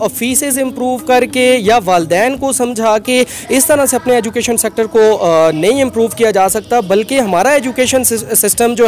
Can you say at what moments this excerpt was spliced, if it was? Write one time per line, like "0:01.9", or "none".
none